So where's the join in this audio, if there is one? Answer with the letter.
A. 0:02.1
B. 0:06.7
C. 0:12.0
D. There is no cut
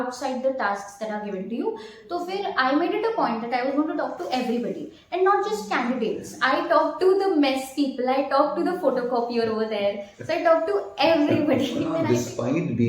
C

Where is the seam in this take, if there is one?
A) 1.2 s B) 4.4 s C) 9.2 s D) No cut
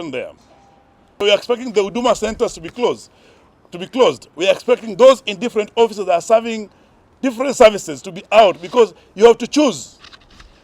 A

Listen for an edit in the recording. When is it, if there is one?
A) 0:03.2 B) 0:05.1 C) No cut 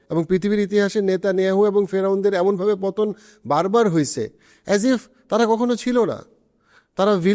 C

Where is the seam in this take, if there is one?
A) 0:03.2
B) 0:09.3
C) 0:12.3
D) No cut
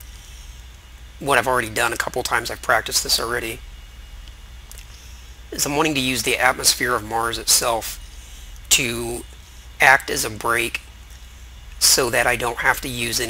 D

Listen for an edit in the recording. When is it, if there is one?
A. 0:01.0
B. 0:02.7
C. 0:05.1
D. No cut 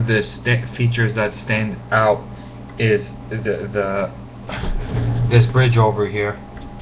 B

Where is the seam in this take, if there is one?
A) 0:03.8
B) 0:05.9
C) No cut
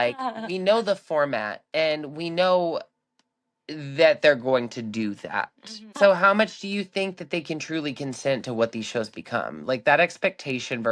B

